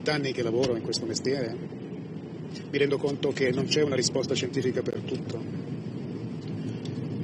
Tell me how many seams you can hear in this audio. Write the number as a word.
zero